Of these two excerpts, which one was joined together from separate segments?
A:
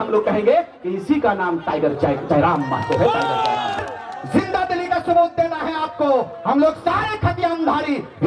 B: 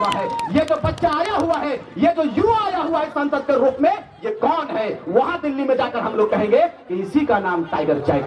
A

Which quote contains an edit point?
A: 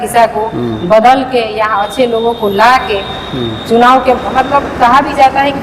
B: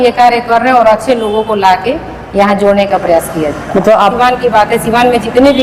B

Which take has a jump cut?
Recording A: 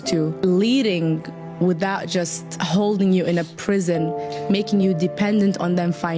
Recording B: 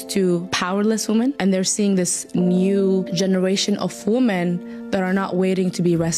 A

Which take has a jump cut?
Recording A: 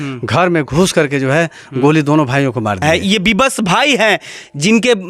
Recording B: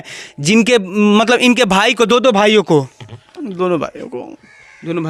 A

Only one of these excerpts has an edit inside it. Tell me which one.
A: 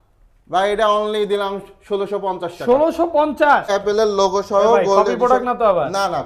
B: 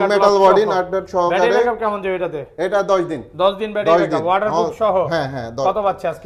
A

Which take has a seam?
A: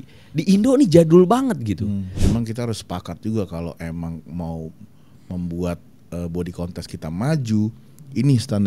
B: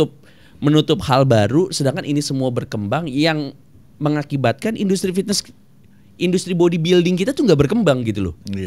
A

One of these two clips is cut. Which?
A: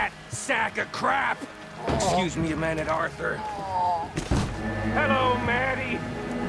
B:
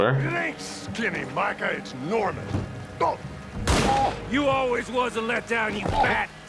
A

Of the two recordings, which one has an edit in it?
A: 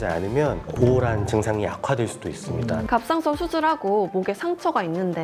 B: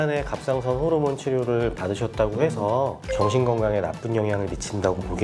A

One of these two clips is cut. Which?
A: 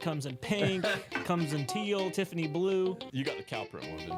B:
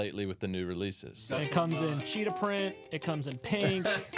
B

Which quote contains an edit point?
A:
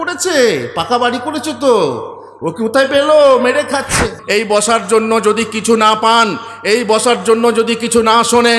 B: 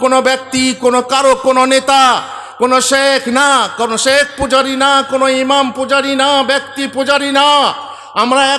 A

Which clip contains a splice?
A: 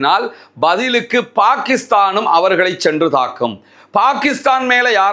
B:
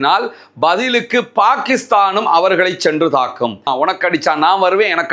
B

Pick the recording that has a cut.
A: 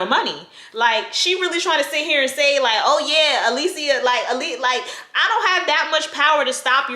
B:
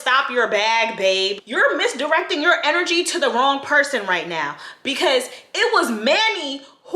B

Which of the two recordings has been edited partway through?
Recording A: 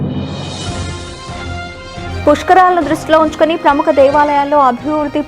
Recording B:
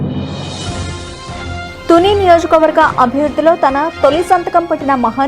A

